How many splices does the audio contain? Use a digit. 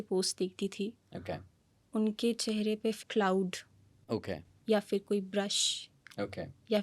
1